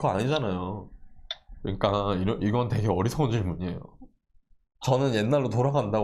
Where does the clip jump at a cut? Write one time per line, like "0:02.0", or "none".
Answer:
0:01.6
0:04.8